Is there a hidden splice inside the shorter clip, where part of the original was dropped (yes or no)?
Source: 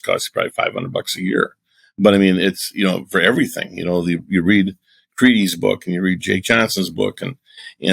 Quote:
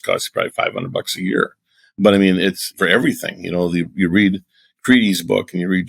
yes